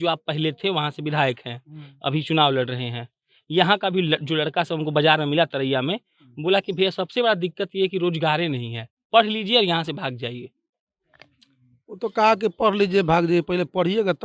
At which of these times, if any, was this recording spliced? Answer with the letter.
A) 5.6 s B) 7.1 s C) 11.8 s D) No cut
D